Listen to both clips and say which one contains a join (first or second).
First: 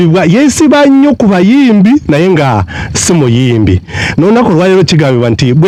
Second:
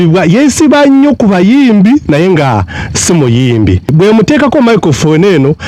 second